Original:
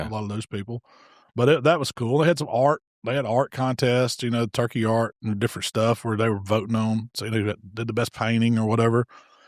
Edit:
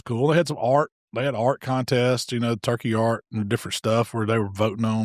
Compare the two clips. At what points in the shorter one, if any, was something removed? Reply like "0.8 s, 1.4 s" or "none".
none